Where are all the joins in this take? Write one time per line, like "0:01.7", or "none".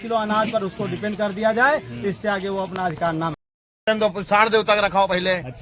0:03.8